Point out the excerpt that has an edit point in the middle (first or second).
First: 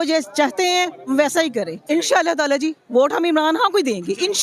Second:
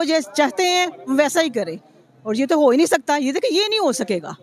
first